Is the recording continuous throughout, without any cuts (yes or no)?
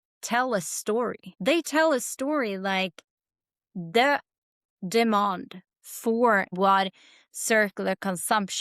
no